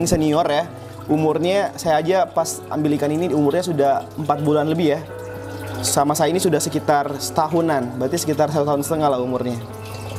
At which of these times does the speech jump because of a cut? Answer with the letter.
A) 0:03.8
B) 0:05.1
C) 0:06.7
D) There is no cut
D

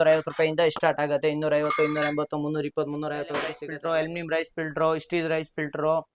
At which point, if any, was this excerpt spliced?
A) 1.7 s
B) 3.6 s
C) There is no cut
B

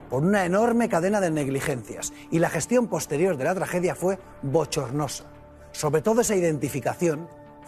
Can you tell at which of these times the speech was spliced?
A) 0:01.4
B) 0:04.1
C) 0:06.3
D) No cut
D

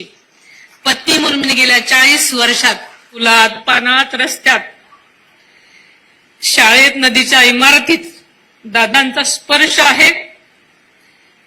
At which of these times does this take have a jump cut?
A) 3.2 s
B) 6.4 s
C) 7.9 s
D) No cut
A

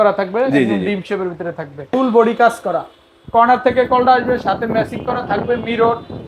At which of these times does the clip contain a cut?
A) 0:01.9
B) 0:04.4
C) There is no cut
A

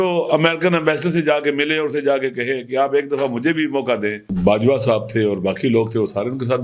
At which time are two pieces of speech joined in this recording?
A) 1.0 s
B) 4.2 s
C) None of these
B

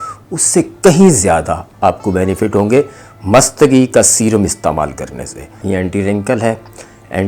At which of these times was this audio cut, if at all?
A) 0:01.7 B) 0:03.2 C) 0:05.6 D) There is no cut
C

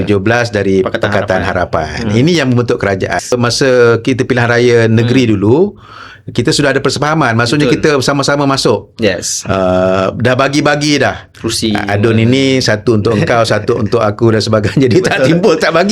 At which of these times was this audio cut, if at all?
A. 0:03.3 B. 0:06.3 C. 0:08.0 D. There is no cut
A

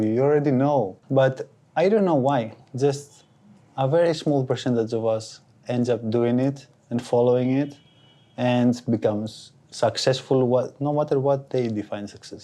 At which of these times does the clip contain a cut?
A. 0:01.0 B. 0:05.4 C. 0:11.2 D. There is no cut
A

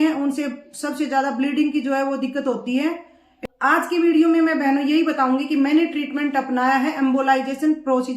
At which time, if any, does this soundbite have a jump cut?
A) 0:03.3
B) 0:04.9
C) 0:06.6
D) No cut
A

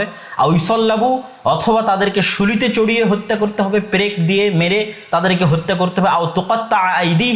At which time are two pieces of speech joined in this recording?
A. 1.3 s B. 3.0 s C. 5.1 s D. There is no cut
D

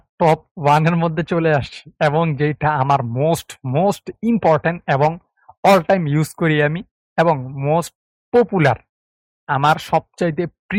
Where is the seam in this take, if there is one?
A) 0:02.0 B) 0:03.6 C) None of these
C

